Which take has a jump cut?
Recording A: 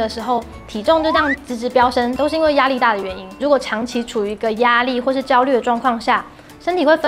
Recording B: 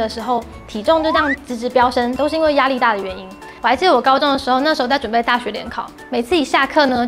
A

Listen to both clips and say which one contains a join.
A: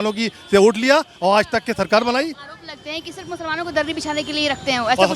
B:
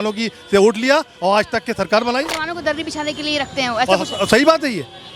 B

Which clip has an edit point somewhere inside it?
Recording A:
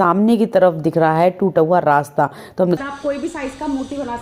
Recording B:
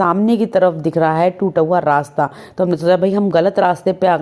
A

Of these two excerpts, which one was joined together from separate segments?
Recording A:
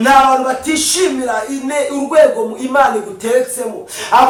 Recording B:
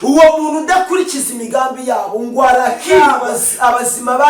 B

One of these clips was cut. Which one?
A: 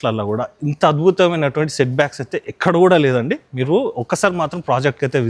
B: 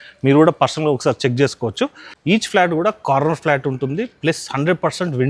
B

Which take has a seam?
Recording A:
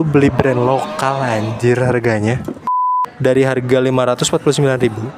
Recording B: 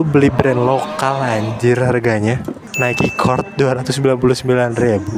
A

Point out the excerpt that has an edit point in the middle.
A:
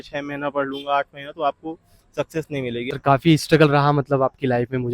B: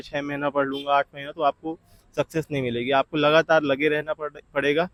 A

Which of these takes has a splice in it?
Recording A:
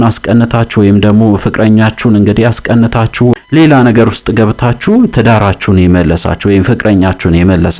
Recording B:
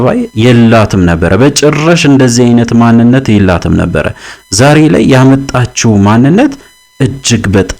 A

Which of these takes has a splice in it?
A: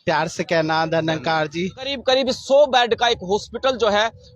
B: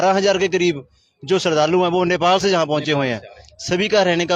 A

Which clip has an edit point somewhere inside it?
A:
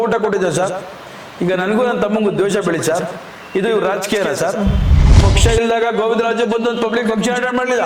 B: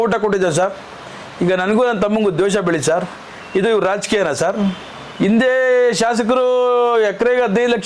A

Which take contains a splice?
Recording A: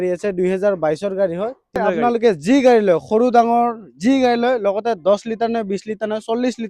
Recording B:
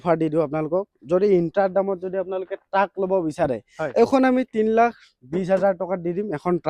A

